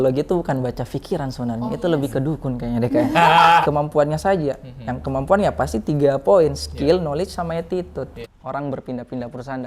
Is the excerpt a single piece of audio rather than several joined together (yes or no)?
no